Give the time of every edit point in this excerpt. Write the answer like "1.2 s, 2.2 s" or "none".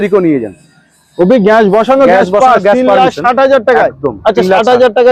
none